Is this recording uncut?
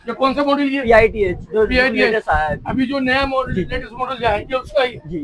yes; 0 cuts

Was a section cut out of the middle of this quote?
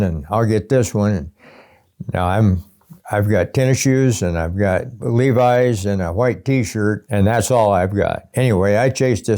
yes; 3 cuts; at 5.0 s, 7.0 s, 8.3 s

